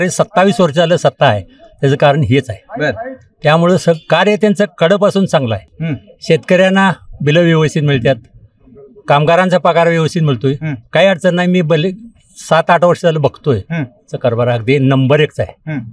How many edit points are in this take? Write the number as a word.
zero